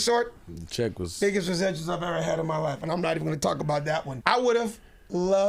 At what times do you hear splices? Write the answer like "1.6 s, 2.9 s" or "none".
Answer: 4.1 s